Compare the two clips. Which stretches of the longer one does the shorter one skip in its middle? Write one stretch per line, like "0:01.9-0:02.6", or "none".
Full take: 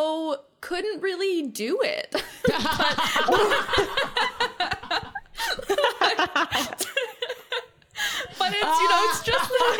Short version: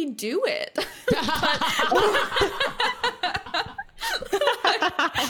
none